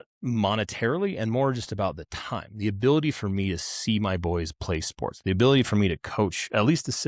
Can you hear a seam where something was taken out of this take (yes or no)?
no